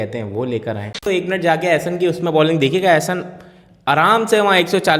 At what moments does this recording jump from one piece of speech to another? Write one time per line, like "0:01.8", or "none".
0:01.0